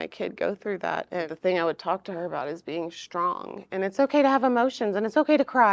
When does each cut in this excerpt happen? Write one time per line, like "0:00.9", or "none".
0:01.3